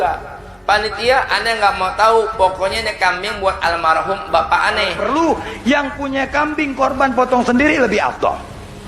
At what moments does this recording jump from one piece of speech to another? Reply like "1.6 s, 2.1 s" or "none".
5.0 s

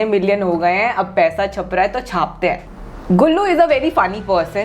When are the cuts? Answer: 2.6 s

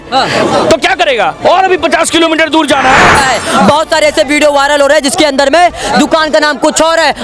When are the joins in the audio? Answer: 3.2 s

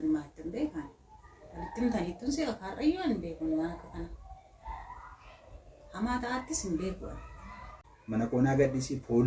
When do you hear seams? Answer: 8.3 s

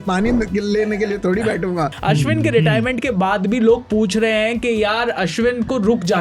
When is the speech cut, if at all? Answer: 1.9 s

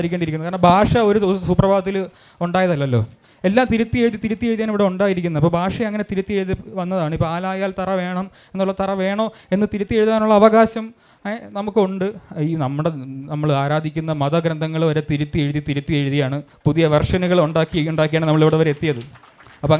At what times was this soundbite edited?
3.2 s, 16.5 s

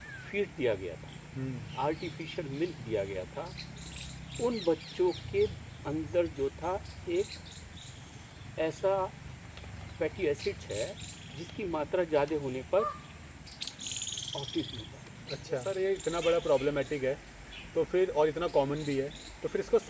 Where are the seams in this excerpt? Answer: 15.6 s

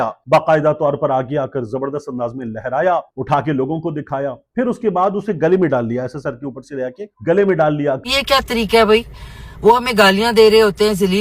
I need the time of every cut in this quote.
8.0 s

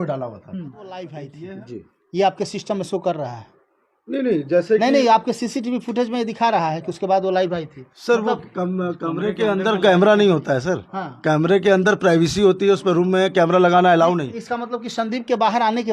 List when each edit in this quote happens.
1.3 s

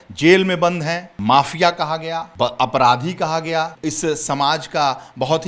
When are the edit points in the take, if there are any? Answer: 1.1 s, 2.2 s, 3.7 s

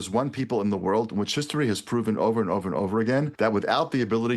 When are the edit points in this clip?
3.3 s

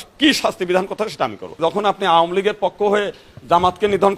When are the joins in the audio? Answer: 1.5 s

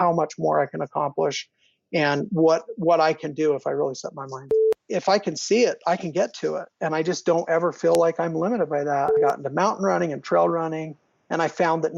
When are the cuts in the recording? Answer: 4.5 s, 9.2 s

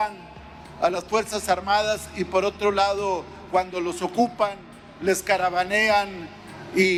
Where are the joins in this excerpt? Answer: none

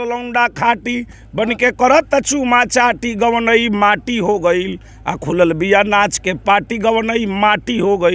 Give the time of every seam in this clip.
none

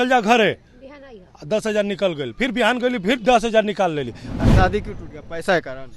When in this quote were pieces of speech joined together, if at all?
4.3 s

